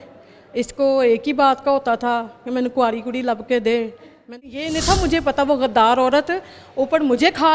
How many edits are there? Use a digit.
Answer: 1